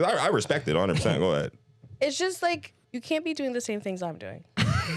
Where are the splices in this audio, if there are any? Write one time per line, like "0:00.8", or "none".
0:02.8